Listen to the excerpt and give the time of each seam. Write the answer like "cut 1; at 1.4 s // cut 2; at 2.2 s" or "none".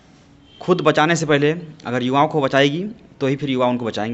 none

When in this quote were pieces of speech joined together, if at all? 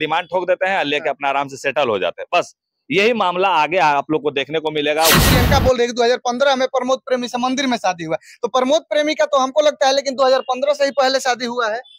cut 1; at 5.1 s

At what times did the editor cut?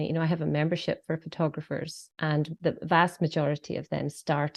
cut 1; at 2.4 s

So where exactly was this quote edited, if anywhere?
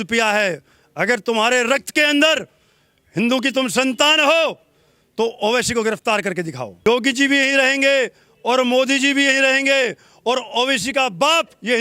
cut 1; at 6.8 s

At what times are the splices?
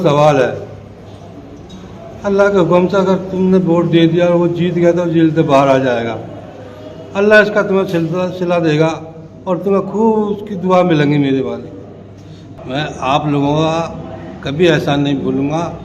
cut 1; at 12.5 s

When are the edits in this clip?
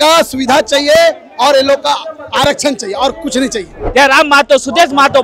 cut 1; at 3.8 s

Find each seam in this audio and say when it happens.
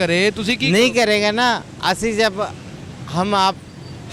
none

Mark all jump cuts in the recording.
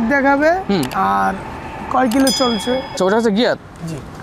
cut 1; at 2.9 s

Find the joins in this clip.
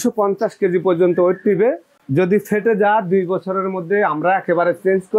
none

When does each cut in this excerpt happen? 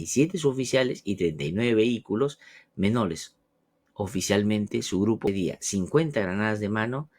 cut 1; at 5.2 s

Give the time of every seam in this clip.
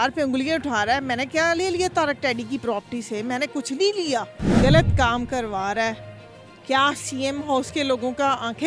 cut 1; at 4.4 s

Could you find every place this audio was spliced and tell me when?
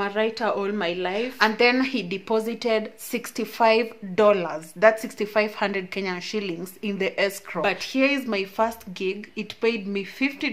cut 1; at 1.3 s // cut 2; at 7.6 s

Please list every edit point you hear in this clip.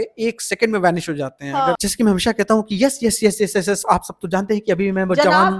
cut 1; at 1.8 s

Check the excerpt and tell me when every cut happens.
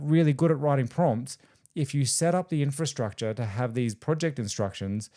none

